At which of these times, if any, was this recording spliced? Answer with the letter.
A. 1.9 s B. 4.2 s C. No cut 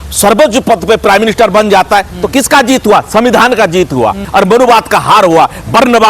B